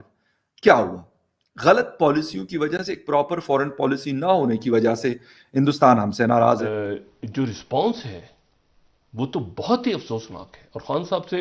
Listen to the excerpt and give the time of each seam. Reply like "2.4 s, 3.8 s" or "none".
6.7 s